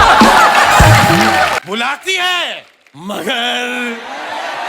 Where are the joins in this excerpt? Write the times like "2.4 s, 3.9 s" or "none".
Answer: 1.6 s